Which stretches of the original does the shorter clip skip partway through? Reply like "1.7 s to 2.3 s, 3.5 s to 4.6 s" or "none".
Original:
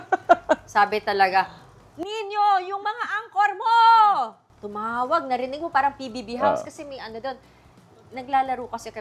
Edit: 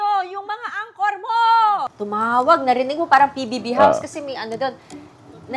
4.4 s to 4.6 s